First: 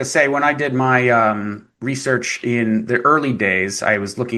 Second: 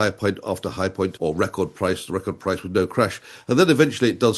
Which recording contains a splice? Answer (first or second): second